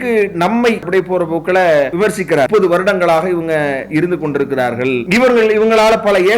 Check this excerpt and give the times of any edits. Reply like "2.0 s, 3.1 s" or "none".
0.9 s, 2.2 s